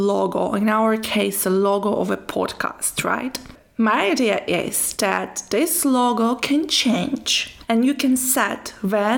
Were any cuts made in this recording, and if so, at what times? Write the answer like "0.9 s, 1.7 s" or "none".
3.6 s